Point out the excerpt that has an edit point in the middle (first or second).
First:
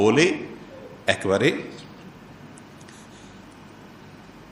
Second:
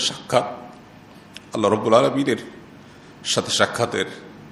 first